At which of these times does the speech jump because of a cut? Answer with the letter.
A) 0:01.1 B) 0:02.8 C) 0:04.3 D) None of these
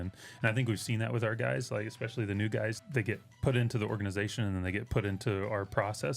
B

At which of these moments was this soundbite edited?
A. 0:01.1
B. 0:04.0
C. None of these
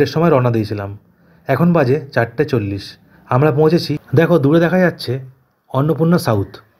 B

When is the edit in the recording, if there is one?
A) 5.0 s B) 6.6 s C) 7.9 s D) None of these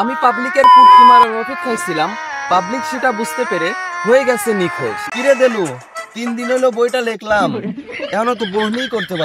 A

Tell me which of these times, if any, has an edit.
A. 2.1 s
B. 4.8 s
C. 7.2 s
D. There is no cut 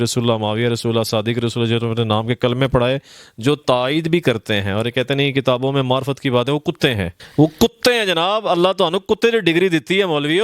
C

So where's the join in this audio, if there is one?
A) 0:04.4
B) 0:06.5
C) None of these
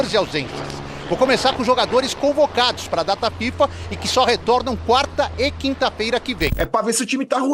B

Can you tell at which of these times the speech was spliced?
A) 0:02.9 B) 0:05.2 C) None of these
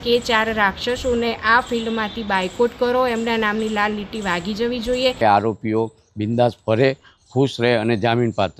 B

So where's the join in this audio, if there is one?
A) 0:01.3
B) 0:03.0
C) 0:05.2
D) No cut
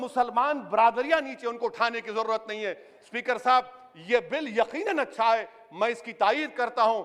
D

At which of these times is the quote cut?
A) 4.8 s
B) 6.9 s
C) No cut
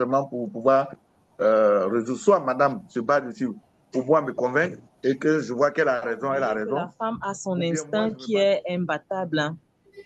B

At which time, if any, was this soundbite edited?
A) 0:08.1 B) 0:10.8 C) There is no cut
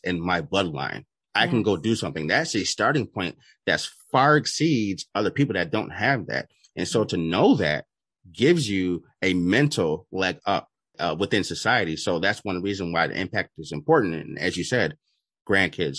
B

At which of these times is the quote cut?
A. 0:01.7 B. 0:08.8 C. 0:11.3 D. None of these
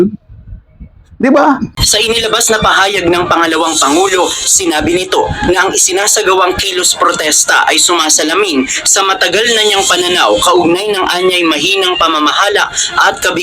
A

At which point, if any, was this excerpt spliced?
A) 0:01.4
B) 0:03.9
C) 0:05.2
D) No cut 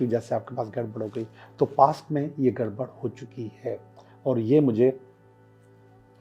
D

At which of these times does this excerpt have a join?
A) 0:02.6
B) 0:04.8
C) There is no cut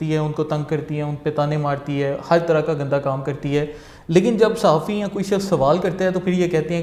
C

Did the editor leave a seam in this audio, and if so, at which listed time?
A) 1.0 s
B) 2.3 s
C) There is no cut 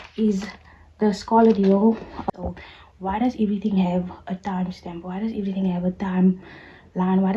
B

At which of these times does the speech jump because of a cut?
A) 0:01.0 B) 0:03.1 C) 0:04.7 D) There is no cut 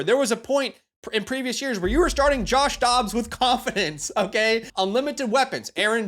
C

